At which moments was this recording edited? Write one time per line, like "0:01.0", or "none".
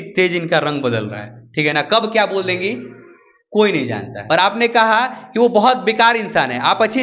0:04.1